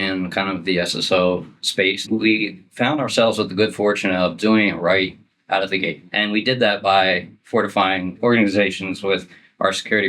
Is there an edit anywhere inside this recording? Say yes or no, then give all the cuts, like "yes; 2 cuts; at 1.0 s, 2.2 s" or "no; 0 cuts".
yes; 2 cuts; at 2.0 s, 6.0 s